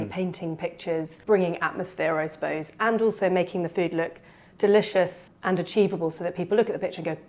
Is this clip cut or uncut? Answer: cut